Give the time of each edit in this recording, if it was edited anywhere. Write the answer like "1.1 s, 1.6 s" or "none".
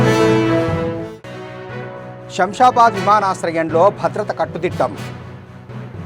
1.6 s